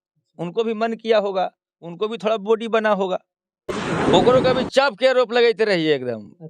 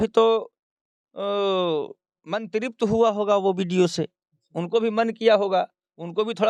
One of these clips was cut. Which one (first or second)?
first